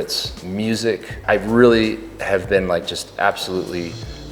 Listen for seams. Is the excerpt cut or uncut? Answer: cut